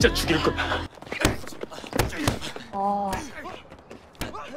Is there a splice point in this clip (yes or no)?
yes